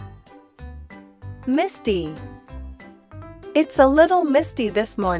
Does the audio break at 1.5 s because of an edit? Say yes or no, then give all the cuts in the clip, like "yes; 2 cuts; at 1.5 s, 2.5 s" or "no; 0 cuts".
no; 0 cuts